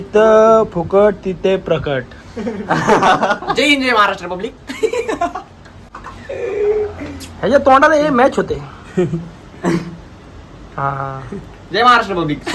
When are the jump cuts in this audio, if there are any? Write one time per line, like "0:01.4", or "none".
none